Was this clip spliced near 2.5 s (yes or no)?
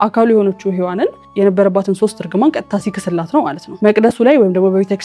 no